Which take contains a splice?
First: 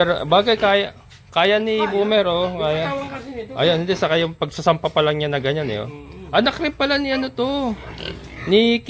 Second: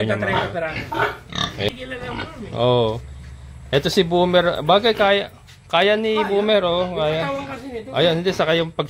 second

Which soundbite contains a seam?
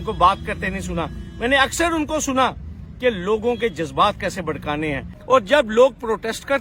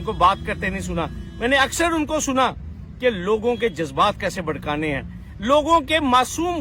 first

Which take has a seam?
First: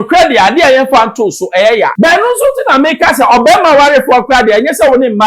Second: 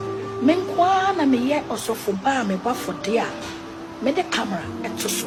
first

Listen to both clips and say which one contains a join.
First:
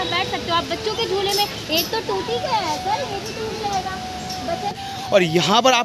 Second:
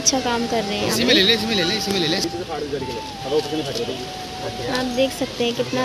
first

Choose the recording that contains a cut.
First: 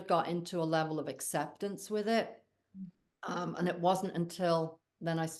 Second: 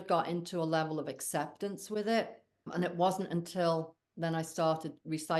second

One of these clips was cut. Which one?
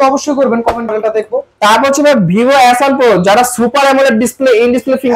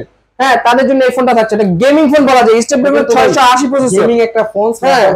first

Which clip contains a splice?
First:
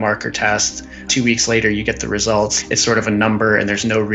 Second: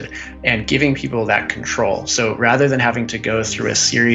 first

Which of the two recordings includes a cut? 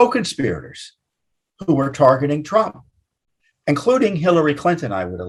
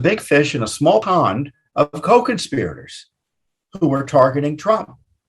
second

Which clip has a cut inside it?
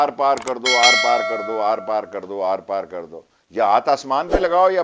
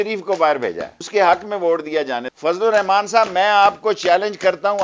second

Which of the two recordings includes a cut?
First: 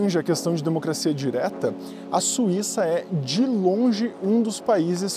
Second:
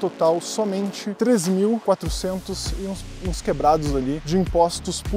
second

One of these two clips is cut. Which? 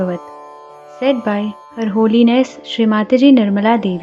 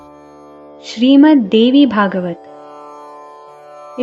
second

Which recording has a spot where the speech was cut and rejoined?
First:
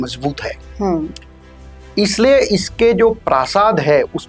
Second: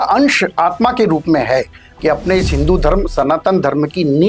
second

